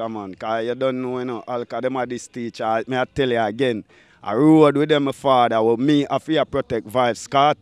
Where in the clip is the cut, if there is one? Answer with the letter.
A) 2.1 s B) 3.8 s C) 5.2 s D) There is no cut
D